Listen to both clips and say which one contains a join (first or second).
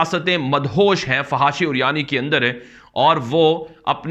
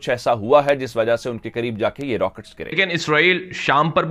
second